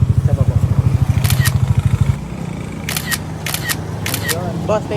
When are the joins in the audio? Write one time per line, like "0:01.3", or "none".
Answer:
0:02.2